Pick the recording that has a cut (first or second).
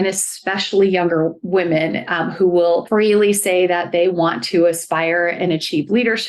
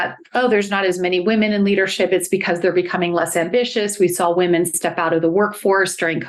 first